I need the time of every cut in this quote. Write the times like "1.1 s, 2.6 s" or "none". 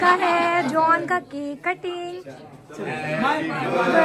none